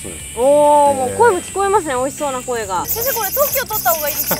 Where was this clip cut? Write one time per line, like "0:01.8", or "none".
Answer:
0:02.9